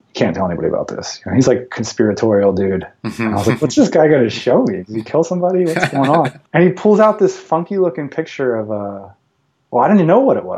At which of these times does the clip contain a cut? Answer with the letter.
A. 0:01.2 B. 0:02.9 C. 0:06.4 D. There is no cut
C